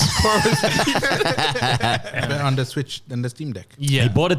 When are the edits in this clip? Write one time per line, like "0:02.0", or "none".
0:02.3

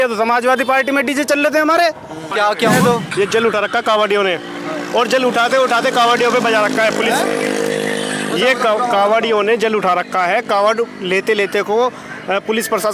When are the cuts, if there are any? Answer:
0:02.2

